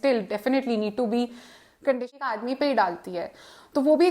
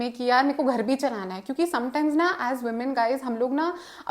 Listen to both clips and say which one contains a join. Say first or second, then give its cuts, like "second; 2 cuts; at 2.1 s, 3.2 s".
first; 1 cut; at 2.3 s